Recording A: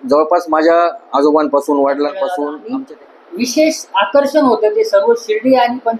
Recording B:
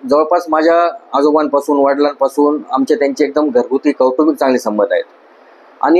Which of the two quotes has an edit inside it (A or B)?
A